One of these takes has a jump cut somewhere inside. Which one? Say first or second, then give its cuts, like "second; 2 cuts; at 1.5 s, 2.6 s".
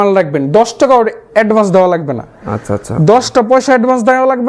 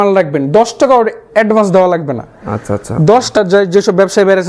second; 1 cut; at 3.4 s